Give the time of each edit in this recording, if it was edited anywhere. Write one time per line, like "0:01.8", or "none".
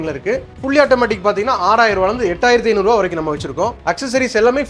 0:03.8